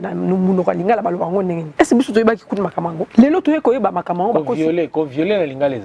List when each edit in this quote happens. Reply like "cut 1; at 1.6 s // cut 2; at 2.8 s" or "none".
cut 1; at 1.6 s // cut 2; at 3.0 s